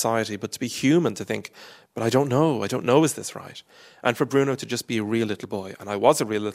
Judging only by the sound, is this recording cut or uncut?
uncut